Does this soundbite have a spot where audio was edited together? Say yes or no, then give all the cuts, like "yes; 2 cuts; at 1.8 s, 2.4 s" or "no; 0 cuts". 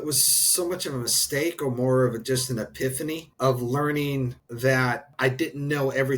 yes; 3 cuts; at 3.3 s, 4.4 s, 5.1 s